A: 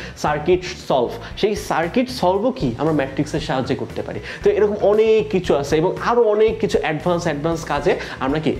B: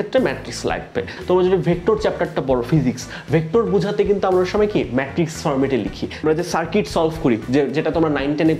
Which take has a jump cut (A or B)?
B